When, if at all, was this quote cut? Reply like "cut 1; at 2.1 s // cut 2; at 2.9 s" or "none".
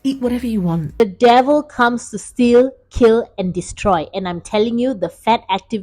cut 1; at 0.9 s